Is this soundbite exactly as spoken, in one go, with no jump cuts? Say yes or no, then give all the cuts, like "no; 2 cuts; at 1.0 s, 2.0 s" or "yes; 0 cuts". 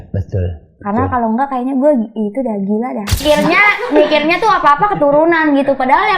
no; 1 cut; at 3.2 s